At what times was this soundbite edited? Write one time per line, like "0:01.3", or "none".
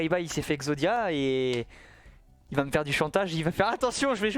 none

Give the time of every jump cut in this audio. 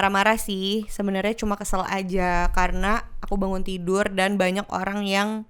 none

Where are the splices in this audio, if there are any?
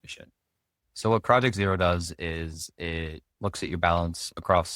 0:03.2

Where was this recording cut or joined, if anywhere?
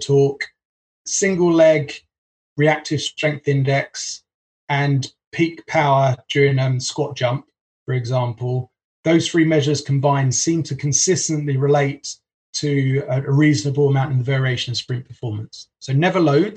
0:00.9

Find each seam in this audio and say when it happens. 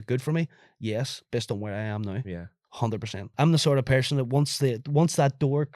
0:03.3

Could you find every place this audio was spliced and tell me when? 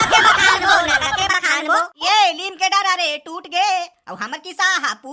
0:02.0

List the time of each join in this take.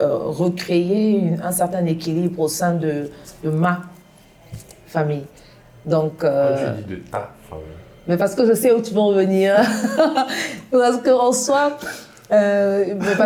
none

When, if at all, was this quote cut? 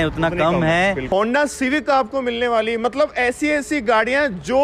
0:01.1

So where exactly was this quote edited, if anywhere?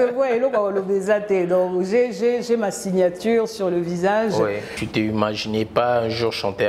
0:04.8

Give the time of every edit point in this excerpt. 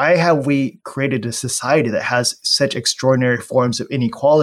none

